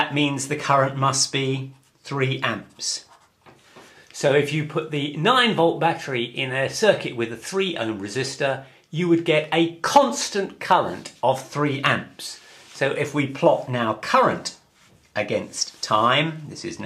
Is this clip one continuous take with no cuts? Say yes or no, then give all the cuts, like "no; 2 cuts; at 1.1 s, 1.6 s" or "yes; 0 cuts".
no; 1 cut; at 2.3 s